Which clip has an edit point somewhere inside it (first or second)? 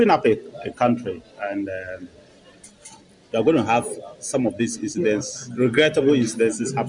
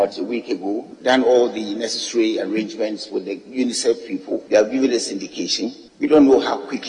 second